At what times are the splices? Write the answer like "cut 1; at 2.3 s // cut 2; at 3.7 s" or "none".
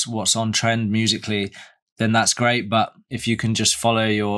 cut 1; at 1.9 s // cut 2; at 3.1 s